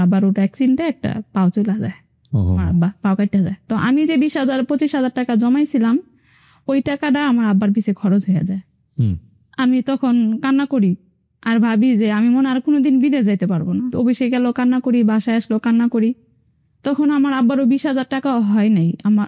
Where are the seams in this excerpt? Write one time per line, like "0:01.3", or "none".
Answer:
none